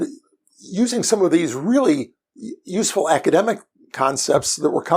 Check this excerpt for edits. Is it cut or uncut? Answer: uncut